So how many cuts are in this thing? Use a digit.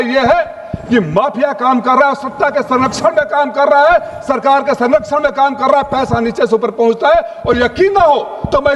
0